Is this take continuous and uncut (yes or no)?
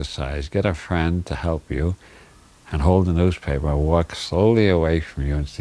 no